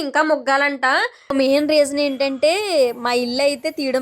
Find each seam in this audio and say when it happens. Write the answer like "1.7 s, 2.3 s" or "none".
1.3 s